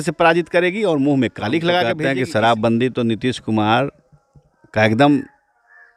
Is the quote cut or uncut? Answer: cut